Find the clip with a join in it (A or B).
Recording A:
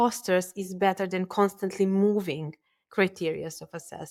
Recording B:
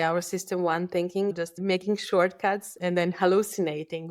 B